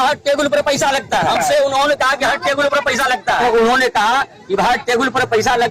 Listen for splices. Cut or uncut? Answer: cut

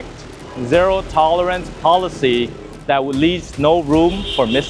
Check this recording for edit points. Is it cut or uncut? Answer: uncut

